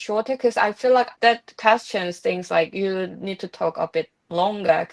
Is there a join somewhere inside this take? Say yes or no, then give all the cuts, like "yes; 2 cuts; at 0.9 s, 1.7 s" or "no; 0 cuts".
yes; 1 cut; at 1.1 s